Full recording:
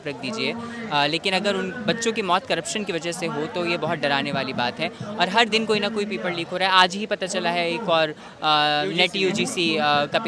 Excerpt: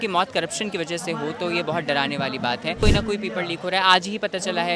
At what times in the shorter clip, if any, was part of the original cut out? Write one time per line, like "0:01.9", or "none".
0:02.8